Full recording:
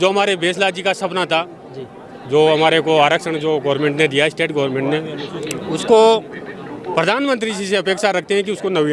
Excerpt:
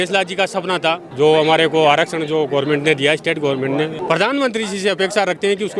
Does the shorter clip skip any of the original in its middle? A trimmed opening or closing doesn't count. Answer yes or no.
yes